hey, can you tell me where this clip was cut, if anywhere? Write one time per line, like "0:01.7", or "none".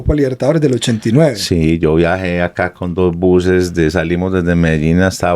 none